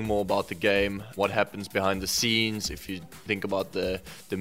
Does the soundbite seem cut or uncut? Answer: cut